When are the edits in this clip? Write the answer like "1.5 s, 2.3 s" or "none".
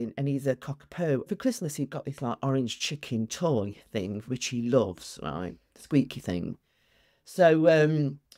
1.3 s